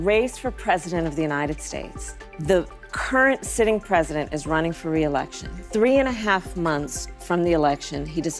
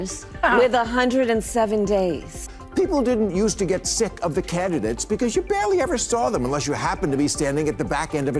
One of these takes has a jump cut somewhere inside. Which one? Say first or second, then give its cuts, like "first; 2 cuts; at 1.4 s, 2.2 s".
second; 1 cut; at 2.4 s